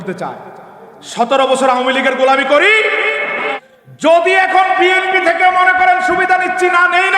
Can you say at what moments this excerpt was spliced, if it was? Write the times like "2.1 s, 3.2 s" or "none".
3.6 s